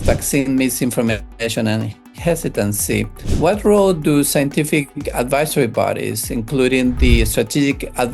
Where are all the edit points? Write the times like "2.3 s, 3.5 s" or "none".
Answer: 3.2 s